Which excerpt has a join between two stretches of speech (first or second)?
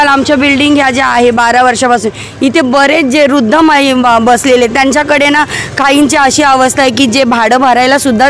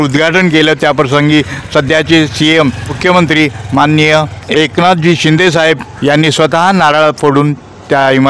second